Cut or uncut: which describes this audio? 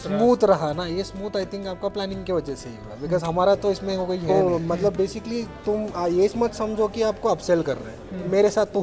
cut